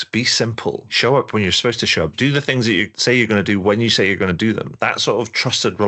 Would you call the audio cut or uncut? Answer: cut